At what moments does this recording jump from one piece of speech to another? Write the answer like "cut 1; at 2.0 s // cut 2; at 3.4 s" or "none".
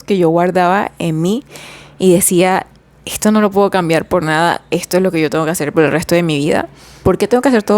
cut 1; at 6.8 s